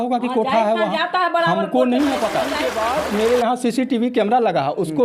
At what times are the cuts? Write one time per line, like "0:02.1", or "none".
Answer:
0:02.7